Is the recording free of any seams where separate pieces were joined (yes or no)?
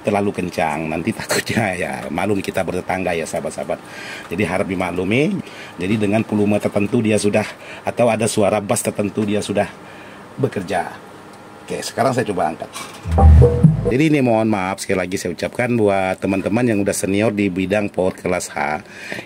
no